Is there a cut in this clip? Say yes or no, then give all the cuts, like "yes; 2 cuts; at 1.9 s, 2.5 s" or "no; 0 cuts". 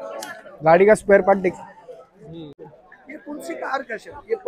yes; 1 cut; at 2.8 s